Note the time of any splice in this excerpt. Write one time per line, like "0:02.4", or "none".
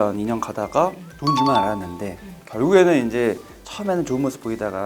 0:01.1